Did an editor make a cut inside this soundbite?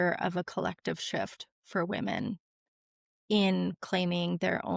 no; 0 cuts

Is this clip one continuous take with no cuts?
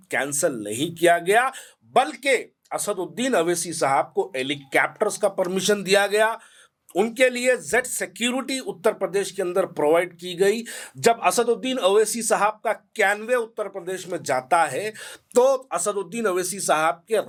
yes; 0 cuts

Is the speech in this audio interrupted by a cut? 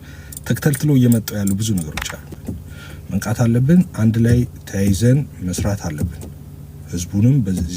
yes; 1 cut; at 2.4 s

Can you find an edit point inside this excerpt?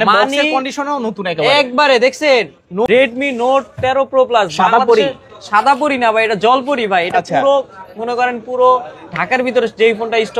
yes; 1 cut; at 2.9 s

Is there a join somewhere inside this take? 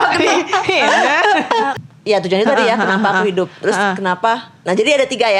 yes; 1 cut; at 1.7 s

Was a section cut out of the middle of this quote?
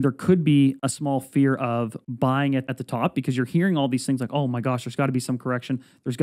yes; 3 cuts; at 0.9 s, 2.0 s, 2.8 s

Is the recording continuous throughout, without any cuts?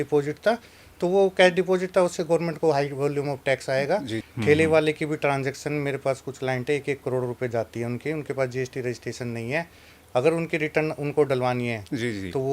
no; 1 cut; at 4.2 s

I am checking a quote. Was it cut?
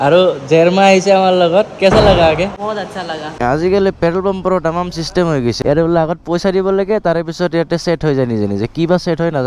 yes; 2 cuts; at 3.3 s, 5.6 s

